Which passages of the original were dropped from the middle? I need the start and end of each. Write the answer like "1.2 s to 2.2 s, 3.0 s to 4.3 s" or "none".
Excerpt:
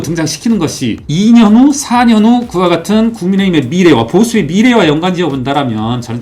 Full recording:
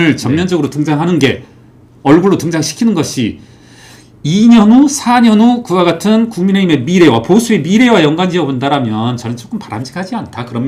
3.4 s to 4.2 s